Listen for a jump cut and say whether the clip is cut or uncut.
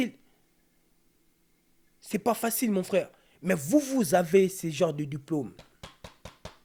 uncut